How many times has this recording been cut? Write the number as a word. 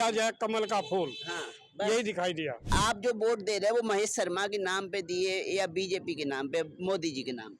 one